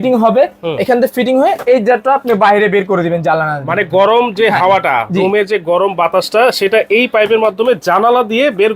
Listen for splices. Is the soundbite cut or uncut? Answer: uncut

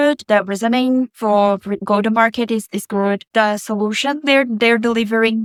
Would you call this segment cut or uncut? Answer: uncut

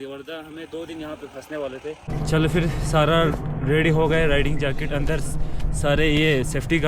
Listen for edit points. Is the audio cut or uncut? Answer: cut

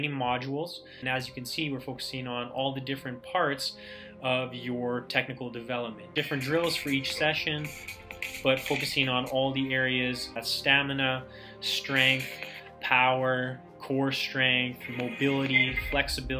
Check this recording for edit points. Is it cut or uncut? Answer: cut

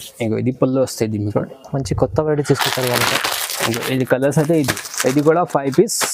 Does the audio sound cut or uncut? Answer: uncut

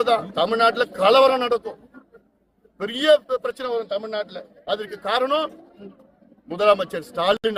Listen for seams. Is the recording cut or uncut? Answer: uncut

